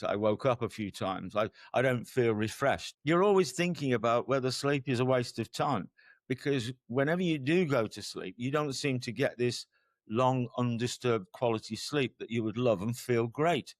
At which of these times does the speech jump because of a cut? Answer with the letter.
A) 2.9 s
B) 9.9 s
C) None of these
A